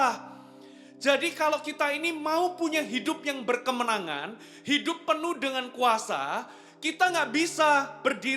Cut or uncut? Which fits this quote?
uncut